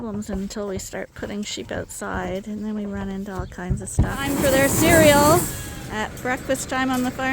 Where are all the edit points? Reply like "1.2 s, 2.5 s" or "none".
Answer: 4.3 s